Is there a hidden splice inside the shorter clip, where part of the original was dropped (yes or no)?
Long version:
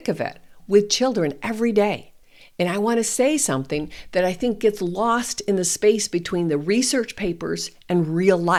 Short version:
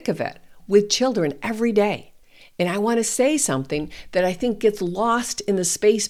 no